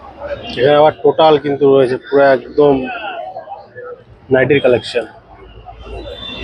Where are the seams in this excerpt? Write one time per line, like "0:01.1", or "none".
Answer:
none